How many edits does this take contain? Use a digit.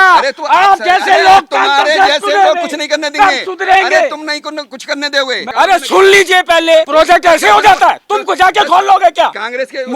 2